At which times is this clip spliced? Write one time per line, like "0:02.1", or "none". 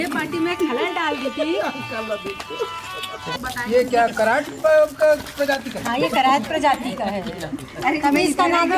0:03.4